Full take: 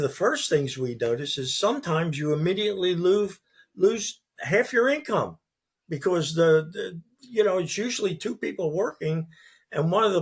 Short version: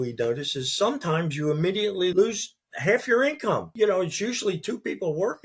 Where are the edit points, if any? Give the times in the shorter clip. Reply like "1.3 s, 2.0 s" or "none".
2.1 s, 3.7 s